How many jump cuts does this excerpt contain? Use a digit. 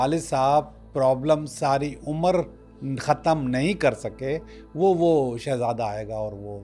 0